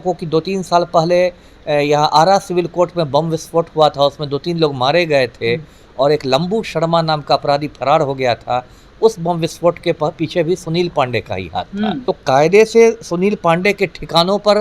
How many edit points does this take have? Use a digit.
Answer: 1